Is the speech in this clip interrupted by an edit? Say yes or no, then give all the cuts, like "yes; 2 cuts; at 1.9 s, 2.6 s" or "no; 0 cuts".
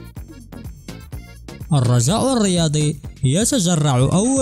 yes; 1 cut; at 1.3 s